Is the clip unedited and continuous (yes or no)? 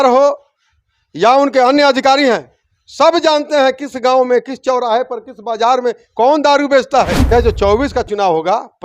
no